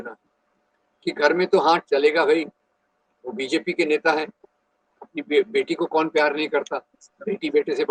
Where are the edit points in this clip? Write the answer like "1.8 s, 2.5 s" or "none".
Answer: none